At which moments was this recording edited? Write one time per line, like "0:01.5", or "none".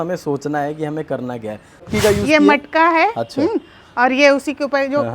0:01.9